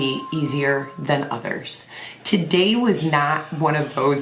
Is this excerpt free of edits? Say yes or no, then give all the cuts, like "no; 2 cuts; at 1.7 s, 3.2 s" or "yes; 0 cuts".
yes; 0 cuts